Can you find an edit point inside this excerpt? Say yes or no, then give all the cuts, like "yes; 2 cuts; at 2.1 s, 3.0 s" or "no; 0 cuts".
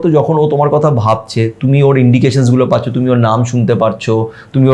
no; 0 cuts